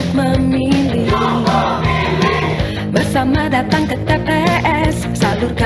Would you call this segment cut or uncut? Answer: uncut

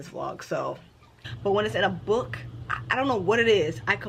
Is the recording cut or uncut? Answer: cut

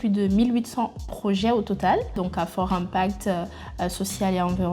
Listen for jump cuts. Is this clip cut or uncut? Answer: uncut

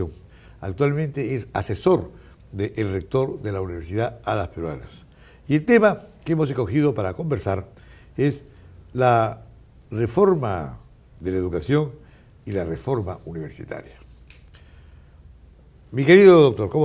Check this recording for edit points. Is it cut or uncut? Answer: cut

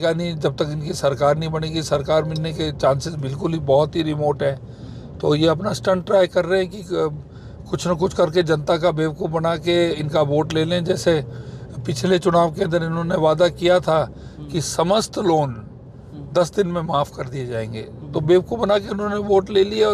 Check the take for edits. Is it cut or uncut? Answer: uncut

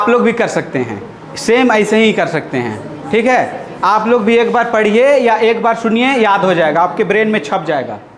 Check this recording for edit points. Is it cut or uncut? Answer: uncut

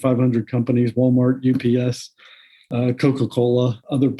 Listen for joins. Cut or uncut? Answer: cut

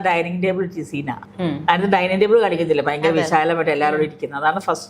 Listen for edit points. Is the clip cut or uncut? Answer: cut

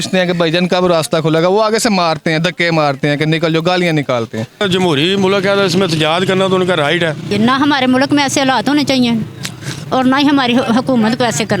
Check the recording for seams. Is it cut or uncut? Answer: cut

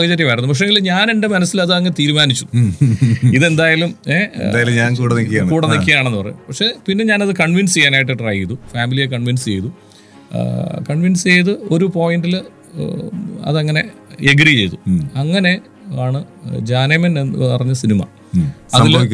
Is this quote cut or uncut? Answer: uncut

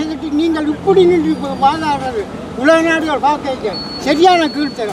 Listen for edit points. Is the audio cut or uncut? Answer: uncut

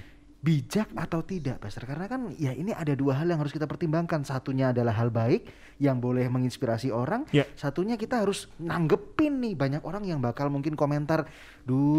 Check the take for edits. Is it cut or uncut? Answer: uncut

